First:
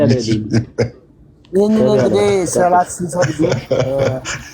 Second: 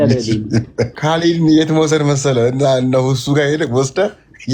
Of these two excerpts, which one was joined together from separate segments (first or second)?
second